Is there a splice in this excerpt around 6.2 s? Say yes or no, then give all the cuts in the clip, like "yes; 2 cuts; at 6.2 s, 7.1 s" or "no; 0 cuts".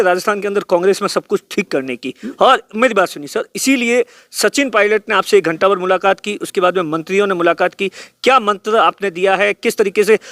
no; 0 cuts